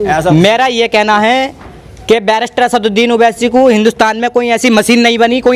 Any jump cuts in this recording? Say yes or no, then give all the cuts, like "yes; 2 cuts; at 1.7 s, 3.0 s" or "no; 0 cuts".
no; 0 cuts